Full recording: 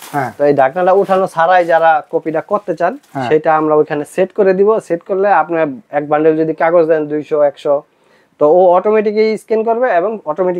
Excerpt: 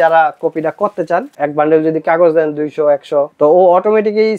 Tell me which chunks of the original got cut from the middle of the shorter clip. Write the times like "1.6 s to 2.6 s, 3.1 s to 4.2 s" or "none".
3.0 s to 5.9 s, 7.8 s to 8.3 s